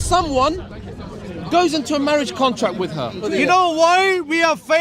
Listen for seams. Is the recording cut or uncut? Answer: cut